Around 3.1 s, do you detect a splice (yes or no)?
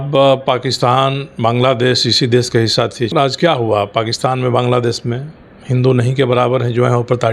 yes